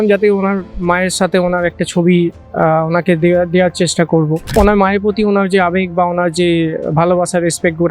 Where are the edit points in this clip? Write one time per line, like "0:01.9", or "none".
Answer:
0:04.5